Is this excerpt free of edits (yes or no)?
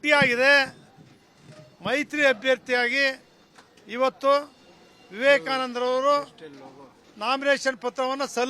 no